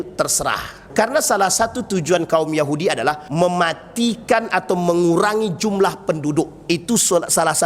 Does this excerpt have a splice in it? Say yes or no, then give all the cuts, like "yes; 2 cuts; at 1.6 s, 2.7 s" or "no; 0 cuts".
yes; 2 cuts; at 0.9 s, 3.2 s